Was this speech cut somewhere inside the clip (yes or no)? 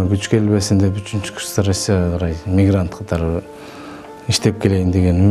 no